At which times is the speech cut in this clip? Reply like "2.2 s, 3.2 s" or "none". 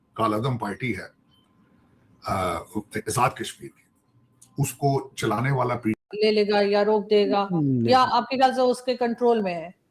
6.0 s